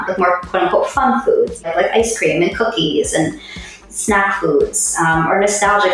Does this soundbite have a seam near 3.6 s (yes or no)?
no